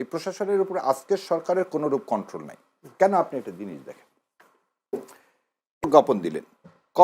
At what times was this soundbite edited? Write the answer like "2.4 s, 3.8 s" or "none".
5.8 s